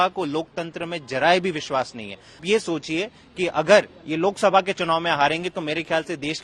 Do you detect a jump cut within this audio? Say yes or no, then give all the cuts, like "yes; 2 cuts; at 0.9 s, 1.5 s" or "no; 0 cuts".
yes; 1 cut; at 2.4 s